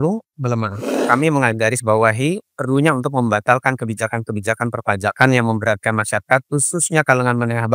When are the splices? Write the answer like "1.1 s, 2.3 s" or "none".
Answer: 0.9 s

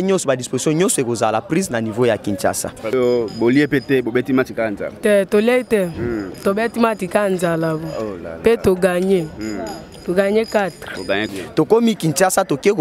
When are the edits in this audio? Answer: 2.9 s, 11.3 s

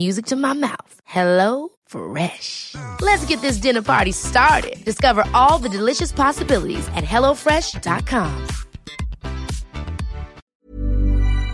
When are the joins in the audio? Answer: 10.4 s

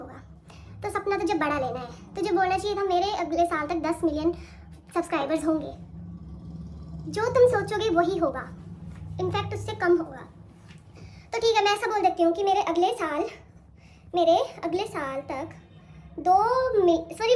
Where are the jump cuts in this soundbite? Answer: none

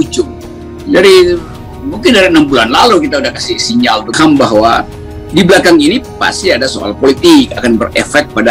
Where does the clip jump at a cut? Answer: 4.1 s

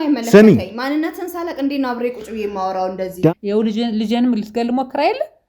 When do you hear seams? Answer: 3.3 s

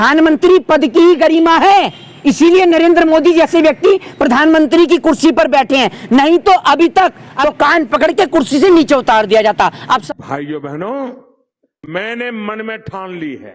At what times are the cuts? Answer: 7.3 s, 10.0 s

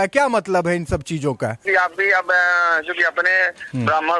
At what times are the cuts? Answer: 1.6 s

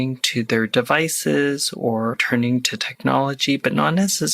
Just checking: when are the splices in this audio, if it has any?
2.5 s

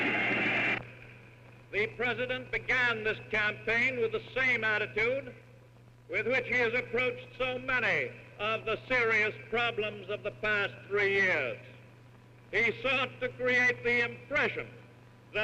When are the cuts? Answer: none

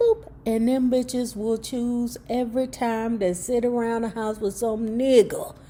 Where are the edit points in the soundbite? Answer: none

